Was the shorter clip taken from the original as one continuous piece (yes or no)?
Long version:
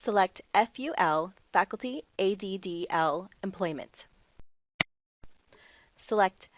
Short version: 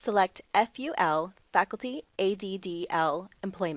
yes